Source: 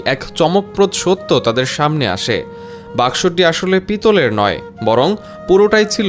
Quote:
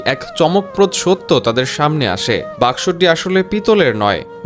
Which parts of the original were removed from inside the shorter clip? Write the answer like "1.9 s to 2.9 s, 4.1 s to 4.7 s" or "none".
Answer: 2.5 s to 2.8 s